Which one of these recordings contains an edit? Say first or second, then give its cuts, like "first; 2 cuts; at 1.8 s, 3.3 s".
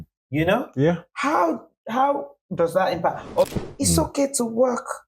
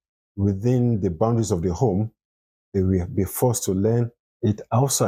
first; 1 cut; at 3.5 s